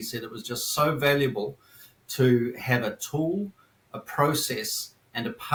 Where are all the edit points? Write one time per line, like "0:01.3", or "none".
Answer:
none